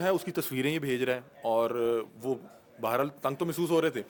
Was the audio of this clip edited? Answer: no; 0 cuts

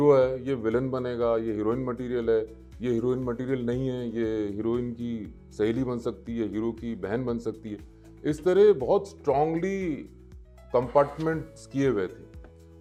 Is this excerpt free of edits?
yes; 0 cuts

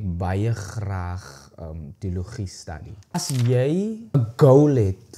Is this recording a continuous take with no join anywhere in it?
no; 2 cuts; at 3.1 s, 4.2 s

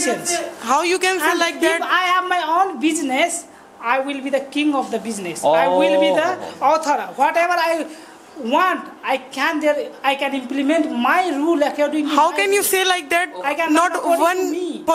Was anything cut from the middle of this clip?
no; 0 cuts

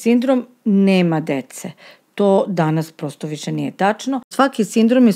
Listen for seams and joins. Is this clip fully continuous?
no; 1 cut; at 4.3 s

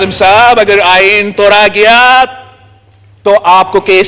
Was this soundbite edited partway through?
no; 0 cuts

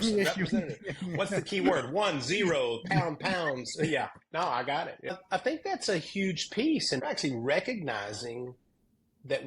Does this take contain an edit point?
yes; 2 cuts; at 5.1 s, 7.0 s

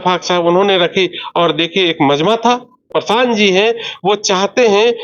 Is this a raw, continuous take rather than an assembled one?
no; 1 cut; at 2.8 s

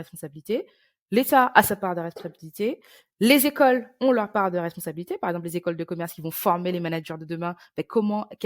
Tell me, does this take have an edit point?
no; 0 cuts

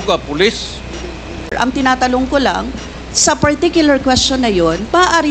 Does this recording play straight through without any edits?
no; 1 cut; at 1.5 s

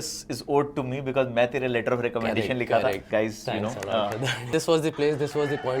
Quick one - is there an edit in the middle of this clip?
yes; 2 cuts; at 3.1 s, 4.5 s

